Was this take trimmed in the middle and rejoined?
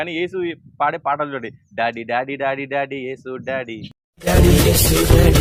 no; 0 cuts

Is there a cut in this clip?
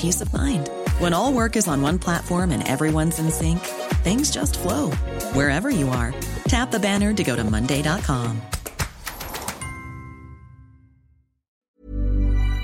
yes; 1 cut; at 11.7 s

